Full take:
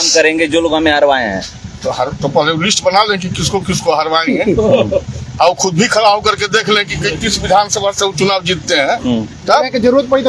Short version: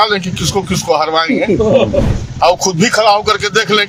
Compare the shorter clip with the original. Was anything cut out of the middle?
no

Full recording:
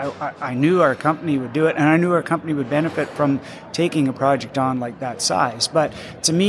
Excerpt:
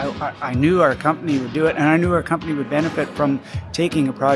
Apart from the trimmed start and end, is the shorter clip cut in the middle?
no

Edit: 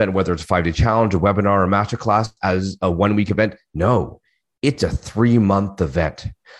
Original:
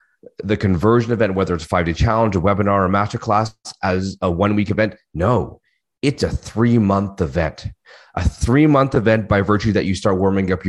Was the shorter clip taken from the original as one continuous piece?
no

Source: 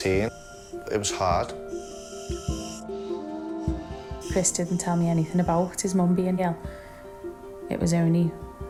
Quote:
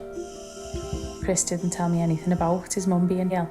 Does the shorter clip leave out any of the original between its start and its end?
yes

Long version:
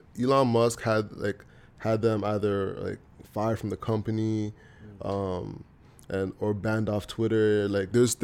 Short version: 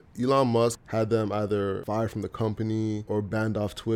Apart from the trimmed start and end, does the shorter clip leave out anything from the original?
yes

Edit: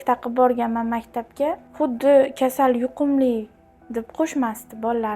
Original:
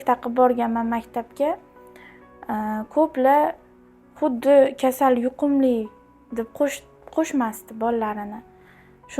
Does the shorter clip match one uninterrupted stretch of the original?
no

